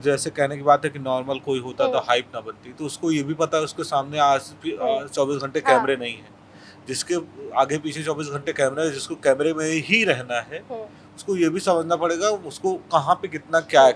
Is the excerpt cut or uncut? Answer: uncut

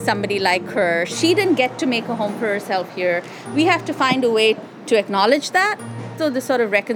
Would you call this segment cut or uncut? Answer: cut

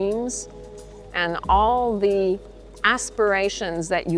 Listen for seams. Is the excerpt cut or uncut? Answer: uncut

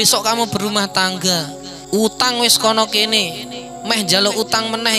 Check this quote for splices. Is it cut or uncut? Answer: uncut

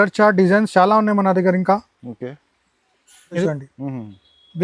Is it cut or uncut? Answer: cut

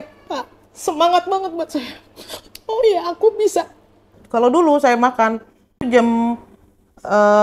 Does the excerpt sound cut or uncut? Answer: cut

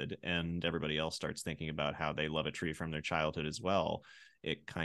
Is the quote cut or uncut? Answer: uncut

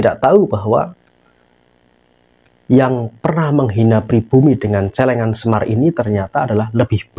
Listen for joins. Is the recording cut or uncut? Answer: uncut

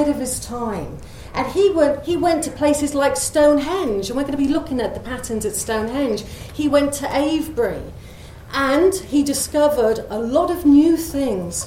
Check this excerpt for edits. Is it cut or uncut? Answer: uncut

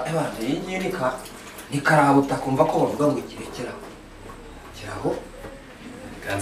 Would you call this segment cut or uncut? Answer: uncut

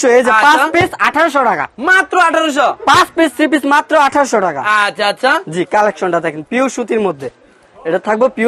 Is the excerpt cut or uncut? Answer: uncut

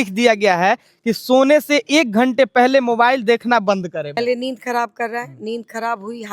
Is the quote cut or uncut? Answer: cut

